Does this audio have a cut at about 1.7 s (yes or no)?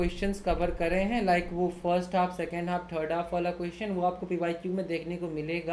no